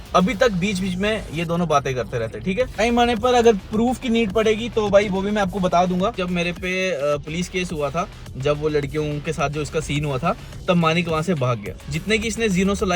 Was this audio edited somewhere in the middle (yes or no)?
yes